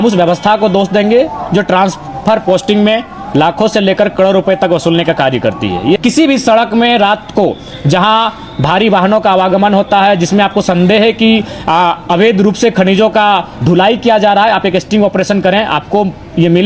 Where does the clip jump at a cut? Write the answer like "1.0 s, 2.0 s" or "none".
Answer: 6.0 s